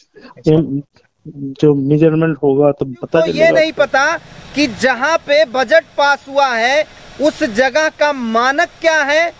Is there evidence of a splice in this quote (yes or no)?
yes